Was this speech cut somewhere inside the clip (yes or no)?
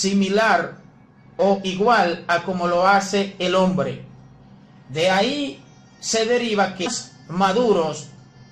no